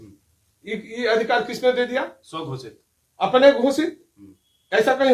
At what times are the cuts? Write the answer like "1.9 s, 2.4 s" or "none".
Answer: none